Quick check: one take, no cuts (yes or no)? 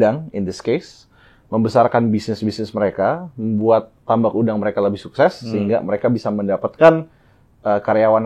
yes